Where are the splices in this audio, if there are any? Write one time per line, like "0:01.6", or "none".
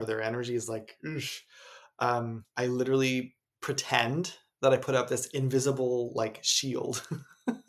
0:02.4